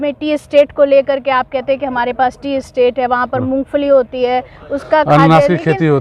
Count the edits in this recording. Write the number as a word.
zero